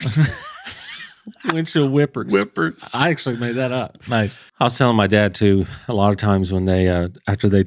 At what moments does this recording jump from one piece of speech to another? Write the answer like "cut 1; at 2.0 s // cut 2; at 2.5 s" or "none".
cut 1; at 4.4 s